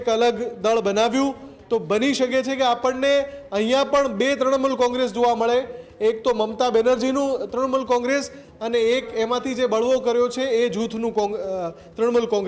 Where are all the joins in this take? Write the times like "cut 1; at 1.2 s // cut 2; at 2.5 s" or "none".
none